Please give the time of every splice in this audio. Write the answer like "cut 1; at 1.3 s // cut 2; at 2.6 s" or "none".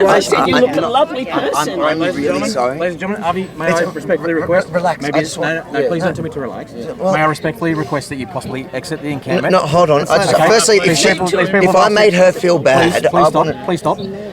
none